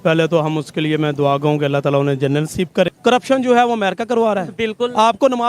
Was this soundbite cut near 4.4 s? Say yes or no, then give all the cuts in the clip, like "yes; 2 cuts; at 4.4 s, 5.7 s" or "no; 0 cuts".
no; 1 cut; at 2.9 s